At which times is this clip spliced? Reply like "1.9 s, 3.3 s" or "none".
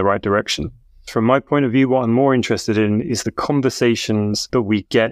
none